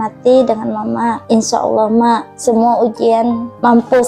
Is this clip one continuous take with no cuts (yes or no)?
no